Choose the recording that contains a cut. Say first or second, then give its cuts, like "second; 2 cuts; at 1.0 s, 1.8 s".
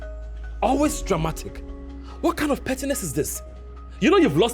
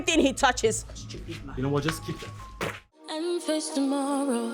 second; 1 cut; at 3.0 s